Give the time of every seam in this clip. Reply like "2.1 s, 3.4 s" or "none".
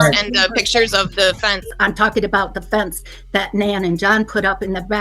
1.7 s